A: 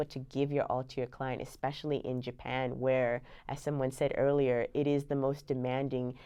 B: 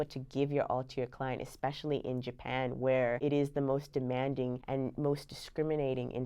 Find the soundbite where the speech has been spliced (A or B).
B